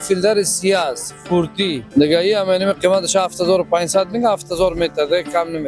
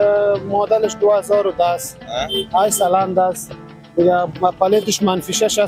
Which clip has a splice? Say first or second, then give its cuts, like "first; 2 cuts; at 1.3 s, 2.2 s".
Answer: first; 1 cut; at 1.8 s